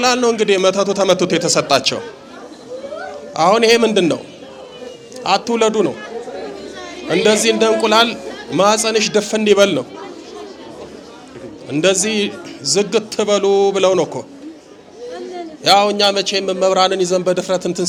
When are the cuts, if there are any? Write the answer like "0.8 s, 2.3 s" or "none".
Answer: none